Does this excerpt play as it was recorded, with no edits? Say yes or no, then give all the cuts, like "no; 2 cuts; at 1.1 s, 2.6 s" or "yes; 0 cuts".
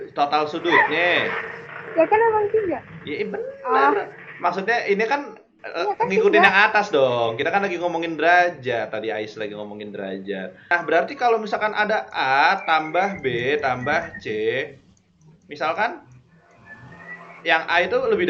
no; 1 cut; at 10.7 s